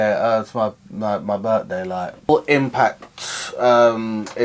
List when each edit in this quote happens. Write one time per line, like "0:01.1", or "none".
0:02.3